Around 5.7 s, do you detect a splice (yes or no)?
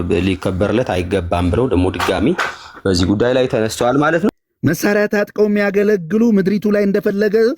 no